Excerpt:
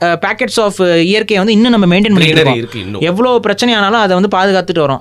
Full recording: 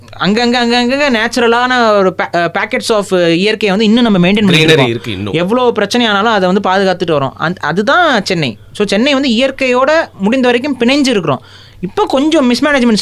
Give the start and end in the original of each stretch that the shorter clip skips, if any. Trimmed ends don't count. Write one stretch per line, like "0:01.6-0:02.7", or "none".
none